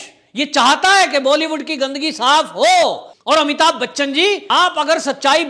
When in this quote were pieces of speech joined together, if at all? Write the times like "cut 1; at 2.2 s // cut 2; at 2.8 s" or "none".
cut 1; at 3.1 s